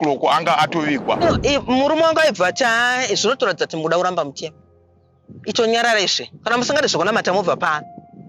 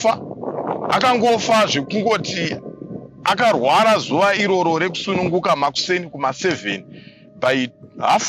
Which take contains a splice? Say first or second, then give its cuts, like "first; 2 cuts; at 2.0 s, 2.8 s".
first; 1 cut; at 1.2 s